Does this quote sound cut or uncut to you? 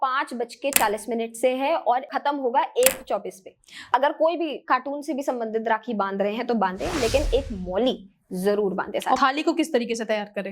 cut